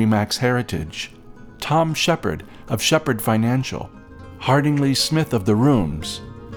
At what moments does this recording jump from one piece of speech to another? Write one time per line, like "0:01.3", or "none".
none